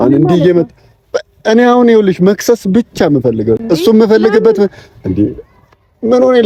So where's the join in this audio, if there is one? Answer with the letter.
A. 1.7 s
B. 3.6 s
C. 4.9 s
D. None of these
D